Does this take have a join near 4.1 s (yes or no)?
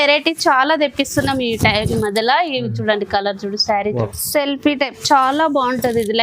yes